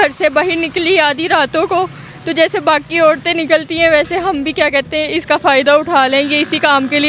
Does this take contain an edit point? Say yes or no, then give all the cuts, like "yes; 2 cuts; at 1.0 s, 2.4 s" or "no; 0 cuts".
no; 0 cuts